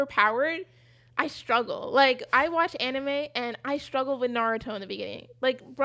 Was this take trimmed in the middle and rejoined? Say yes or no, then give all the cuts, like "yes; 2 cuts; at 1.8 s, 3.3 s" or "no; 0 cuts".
no; 0 cuts